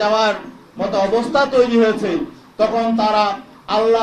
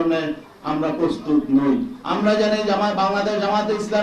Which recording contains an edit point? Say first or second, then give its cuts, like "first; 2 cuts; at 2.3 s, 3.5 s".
second; 1 cut; at 2.0 s